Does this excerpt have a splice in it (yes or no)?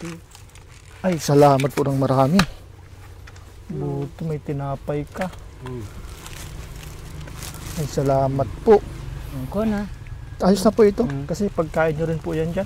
no